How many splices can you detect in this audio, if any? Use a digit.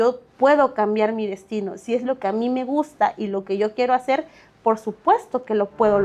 0